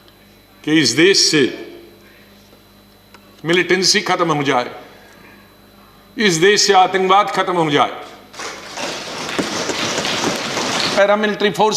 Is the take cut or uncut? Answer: cut